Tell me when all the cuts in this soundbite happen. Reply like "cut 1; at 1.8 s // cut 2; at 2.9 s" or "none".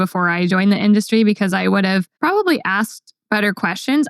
cut 1; at 2.1 s